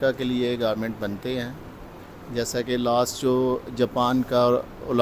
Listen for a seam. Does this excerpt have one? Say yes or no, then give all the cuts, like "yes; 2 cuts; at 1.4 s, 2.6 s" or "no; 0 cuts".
no; 0 cuts